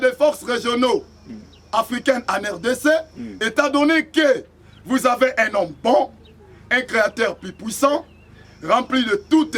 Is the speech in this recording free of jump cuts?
yes; 0 cuts

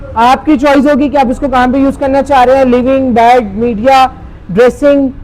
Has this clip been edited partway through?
no; 0 cuts

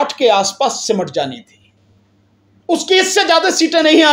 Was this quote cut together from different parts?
no; 0 cuts

